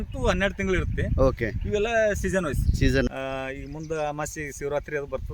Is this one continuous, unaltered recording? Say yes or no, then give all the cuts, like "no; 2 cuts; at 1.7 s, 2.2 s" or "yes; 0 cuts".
no; 1 cut; at 3.1 s